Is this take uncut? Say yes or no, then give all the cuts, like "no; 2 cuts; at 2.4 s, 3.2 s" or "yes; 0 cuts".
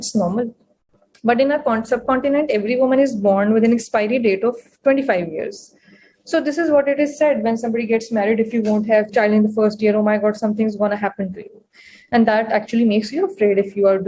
no; 1 cut; at 9.1 s